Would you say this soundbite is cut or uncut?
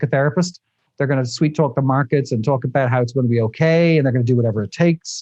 uncut